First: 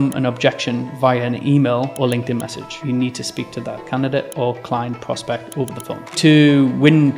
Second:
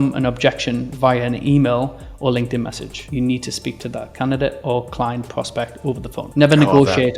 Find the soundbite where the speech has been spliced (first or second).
first